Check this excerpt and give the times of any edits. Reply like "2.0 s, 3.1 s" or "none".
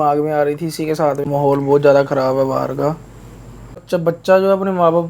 1.3 s, 3.8 s